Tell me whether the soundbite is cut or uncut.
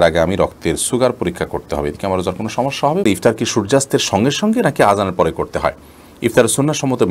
cut